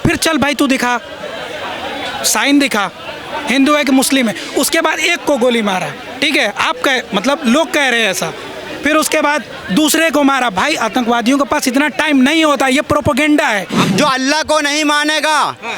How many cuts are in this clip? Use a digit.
1